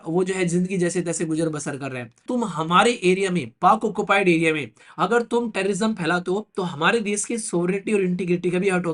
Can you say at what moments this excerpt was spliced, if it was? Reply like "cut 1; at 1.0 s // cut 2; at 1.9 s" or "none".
cut 1; at 2.2 s